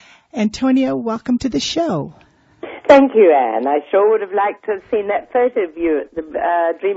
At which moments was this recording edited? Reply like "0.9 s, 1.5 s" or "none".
3.1 s